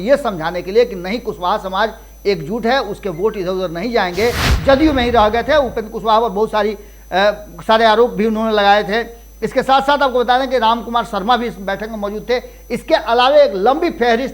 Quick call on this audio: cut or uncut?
cut